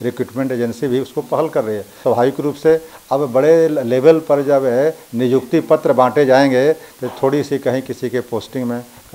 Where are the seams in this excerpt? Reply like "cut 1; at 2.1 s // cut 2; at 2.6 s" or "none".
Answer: cut 1; at 1.9 s